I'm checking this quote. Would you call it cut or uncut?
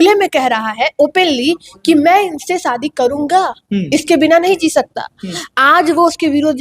uncut